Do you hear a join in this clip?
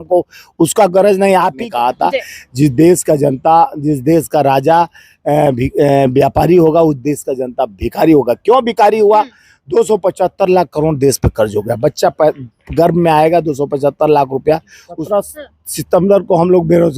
yes; 2 cuts; at 1.6 s, 14.8 s

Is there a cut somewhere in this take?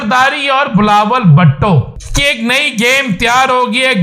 yes; 1 cut; at 2.0 s

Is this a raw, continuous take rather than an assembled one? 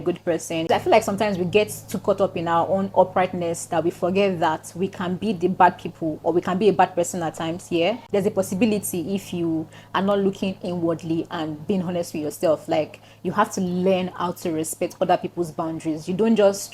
yes; 0 cuts

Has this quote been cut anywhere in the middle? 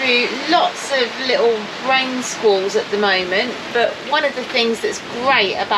no; 0 cuts

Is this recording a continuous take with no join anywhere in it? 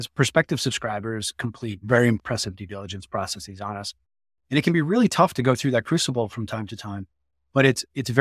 no; 1 cut; at 2.2 s

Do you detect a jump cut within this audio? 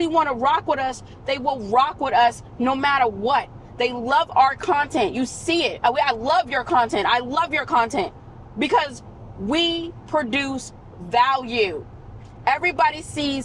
no; 0 cuts

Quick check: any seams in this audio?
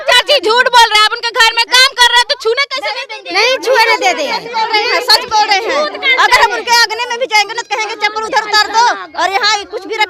no; 0 cuts

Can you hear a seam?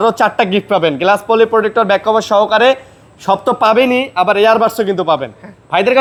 no; 0 cuts

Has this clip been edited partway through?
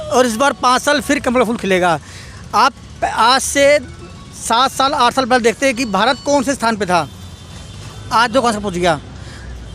no; 0 cuts

